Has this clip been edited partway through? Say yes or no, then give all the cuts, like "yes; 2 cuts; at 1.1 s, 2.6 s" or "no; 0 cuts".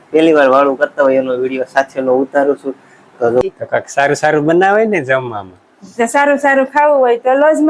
yes; 1 cut; at 3.4 s